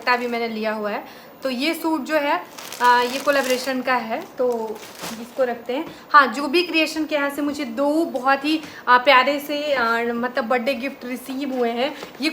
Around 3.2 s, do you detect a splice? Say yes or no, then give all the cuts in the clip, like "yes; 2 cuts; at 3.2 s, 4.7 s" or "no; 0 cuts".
no; 0 cuts